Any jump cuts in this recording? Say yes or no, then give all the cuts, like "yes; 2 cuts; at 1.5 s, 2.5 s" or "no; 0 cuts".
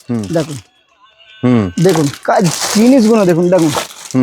no; 0 cuts